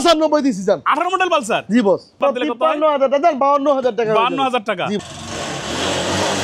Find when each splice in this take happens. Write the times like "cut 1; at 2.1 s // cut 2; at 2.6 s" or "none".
cut 1; at 2.2 s // cut 2; at 5.0 s